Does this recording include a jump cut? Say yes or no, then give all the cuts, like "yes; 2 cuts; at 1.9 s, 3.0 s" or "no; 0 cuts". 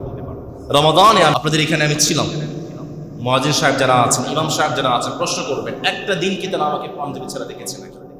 yes; 1 cut; at 1.3 s